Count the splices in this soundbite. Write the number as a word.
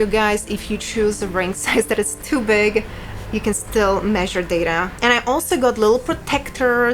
one